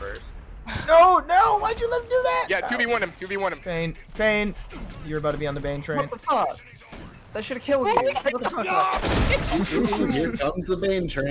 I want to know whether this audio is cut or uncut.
uncut